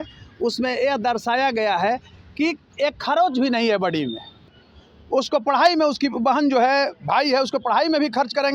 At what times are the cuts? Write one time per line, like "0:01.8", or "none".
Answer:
0:04.5